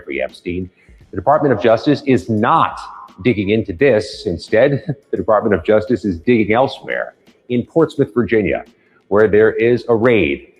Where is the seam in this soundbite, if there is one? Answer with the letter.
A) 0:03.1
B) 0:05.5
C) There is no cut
C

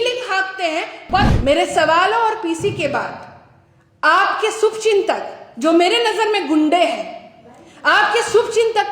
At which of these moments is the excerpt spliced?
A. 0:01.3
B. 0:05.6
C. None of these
A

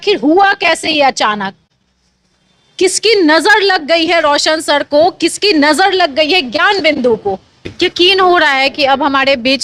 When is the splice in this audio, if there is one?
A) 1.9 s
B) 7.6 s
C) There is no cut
B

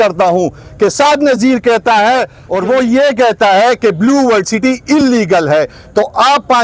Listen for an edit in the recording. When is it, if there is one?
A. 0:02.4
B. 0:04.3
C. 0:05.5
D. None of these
A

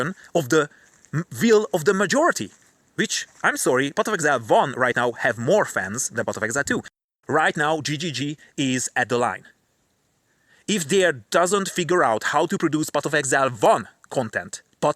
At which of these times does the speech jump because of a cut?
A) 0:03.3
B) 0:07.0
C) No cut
B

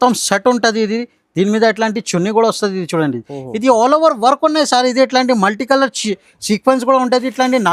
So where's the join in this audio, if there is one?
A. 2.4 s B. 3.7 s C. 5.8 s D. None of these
D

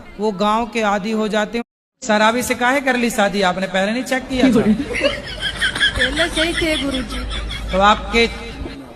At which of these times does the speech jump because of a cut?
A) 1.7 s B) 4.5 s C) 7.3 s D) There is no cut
A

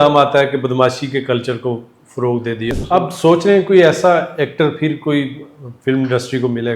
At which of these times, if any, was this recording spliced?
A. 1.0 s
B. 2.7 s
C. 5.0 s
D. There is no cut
B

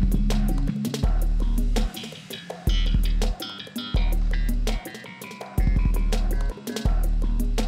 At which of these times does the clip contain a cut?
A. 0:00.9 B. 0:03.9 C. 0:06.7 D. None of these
C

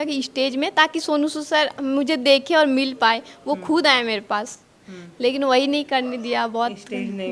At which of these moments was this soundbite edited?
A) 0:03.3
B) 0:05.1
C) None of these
C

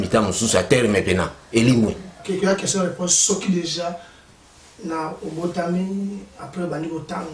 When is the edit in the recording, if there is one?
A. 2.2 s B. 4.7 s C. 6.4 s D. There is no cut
A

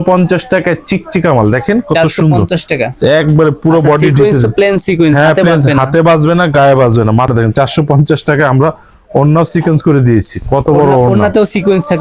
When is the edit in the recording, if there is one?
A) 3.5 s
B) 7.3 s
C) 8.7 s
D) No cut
B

